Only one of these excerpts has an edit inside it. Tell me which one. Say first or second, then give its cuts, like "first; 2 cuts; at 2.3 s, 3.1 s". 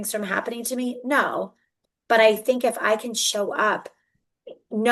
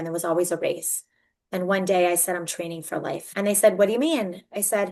second; 1 cut; at 3.3 s